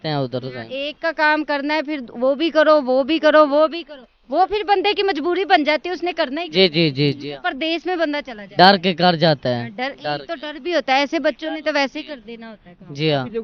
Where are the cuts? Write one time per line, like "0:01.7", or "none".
none